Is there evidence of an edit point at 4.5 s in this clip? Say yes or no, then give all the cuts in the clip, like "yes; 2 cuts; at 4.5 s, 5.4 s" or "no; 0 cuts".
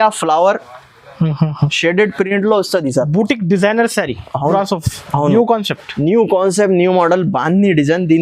yes; 1 cut; at 4.5 s